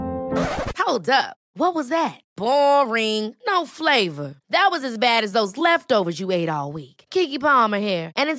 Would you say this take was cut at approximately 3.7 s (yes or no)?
no